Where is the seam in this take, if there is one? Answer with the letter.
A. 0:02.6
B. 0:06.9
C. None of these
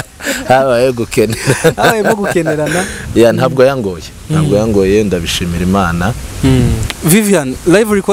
B